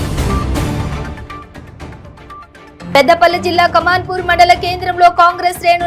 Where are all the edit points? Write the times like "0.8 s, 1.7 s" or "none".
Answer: 0.9 s